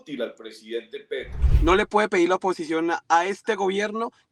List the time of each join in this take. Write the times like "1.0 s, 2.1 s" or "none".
1.4 s